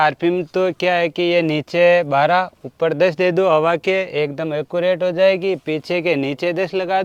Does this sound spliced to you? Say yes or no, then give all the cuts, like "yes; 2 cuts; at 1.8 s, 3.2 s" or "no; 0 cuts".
no; 0 cuts